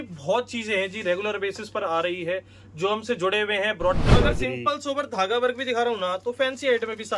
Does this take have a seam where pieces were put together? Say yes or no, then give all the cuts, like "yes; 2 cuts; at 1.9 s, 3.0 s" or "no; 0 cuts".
yes; 1 cut; at 4.1 s